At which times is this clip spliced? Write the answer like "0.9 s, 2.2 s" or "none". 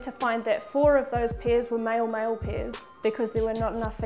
2.8 s